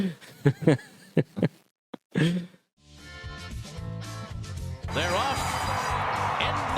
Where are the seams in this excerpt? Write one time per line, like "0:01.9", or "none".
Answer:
0:02.8